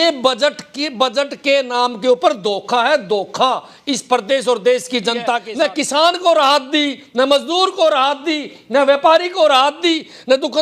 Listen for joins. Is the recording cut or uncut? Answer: cut